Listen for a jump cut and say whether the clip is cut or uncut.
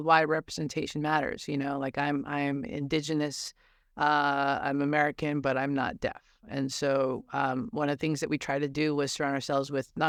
uncut